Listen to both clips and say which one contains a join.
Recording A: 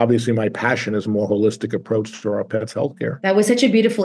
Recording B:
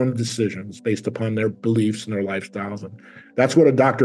A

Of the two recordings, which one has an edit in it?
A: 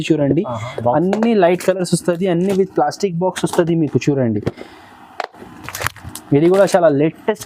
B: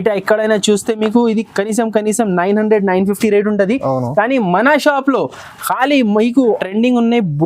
B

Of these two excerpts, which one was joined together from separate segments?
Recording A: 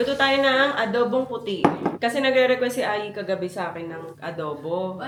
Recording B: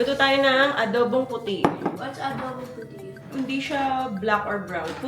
B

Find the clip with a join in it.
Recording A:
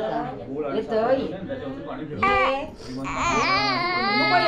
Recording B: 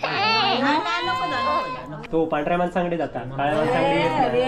B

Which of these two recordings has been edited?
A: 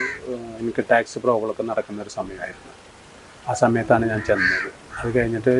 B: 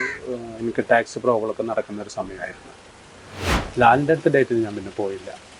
B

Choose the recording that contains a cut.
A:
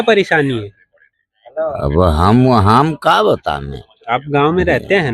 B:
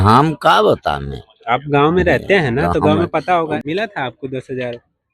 B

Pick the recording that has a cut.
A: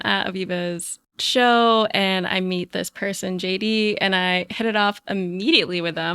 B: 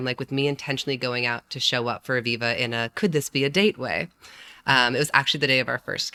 A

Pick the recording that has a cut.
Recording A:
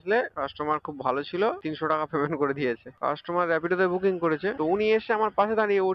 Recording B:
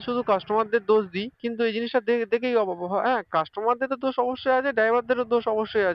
A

